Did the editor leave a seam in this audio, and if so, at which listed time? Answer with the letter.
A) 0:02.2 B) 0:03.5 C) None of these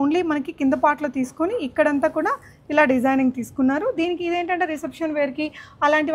C